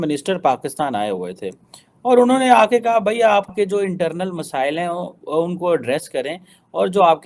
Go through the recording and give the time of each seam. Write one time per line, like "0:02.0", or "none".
0:03.5

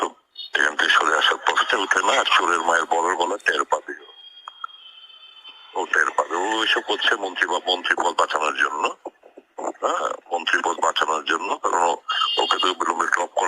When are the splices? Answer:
0:01.2

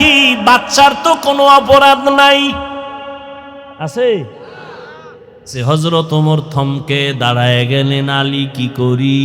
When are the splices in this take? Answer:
0:05.5

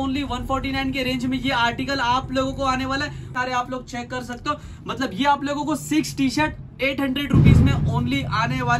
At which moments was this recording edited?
0:03.3

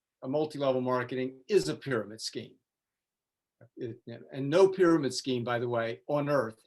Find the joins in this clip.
none

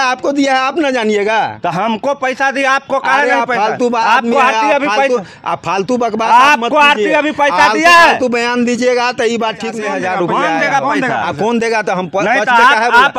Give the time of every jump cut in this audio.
0:09.7

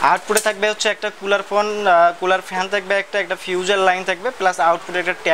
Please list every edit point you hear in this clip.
none

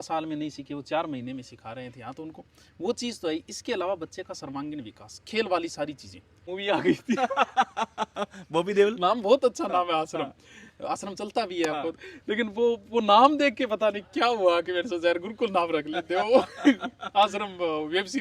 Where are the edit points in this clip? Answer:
0:06.5

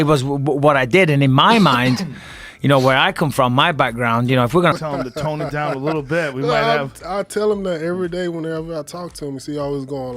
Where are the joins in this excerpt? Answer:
0:04.7

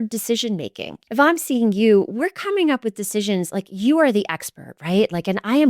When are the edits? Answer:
0:01.0

